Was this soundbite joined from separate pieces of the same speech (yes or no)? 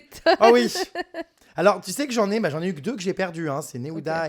no